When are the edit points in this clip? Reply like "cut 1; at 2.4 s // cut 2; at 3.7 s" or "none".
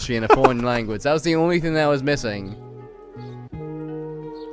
cut 1; at 2.7 s